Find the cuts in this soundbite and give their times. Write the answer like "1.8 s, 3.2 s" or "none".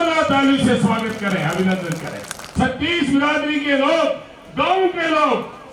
2.4 s